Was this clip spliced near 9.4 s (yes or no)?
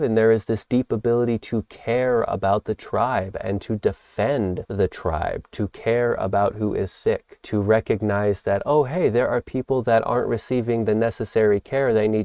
no